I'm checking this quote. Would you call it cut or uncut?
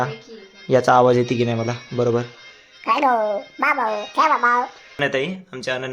cut